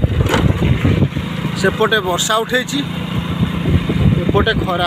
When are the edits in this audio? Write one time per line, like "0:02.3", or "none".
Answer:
none